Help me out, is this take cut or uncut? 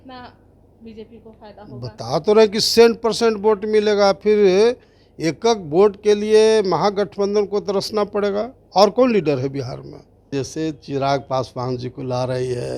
cut